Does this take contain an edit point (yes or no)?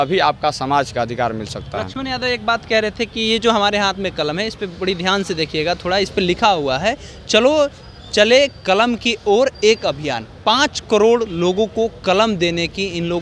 no